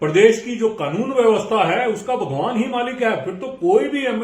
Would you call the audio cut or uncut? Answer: uncut